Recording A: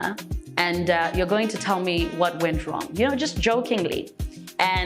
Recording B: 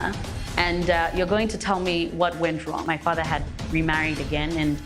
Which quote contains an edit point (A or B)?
B